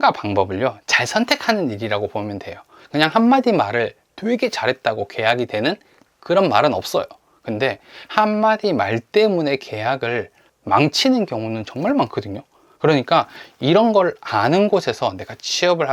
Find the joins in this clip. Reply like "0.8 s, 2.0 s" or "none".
none